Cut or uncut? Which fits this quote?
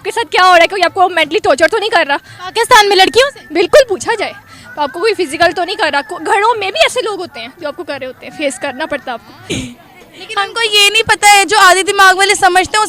cut